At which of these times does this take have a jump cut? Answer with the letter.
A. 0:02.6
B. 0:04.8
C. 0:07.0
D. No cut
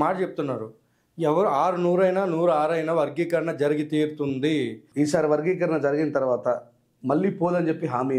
B